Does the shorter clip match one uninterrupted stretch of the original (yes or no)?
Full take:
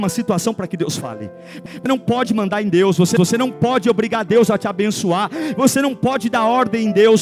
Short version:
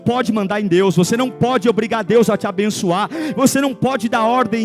no